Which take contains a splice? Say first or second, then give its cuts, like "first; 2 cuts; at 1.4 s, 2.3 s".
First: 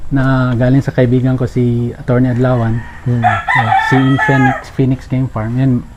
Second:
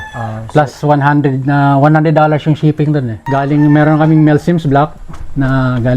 second; 1 cut; at 3.2 s